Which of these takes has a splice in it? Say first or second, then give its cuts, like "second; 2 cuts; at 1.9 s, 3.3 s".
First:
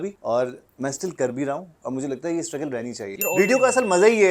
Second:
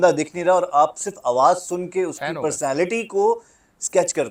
first; 1 cut; at 3.3 s